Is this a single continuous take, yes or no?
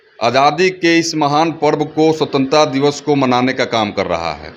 yes